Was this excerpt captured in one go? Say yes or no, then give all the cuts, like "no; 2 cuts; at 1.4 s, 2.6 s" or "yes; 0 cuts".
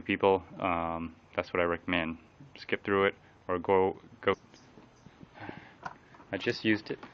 yes; 0 cuts